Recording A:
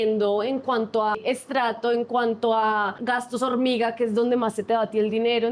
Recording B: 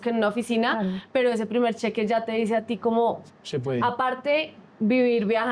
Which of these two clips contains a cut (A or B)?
A